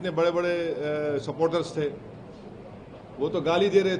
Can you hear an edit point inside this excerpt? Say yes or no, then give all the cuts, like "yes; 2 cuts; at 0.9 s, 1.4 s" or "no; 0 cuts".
no; 0 cuts